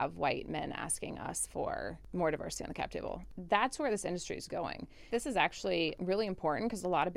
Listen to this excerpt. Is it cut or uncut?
cut